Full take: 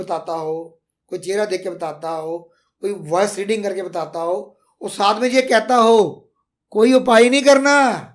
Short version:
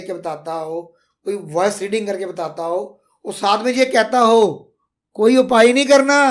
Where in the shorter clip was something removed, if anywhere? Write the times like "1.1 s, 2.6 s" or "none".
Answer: none